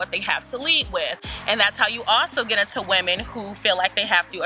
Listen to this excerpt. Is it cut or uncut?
uncut